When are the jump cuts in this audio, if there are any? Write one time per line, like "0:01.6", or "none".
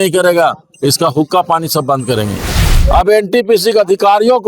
0:02.6